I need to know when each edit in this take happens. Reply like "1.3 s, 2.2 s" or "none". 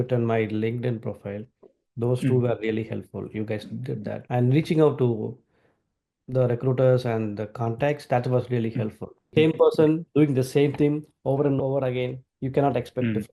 9.2 s